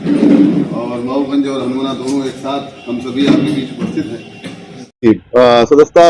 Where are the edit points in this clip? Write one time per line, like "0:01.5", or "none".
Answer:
0:05.0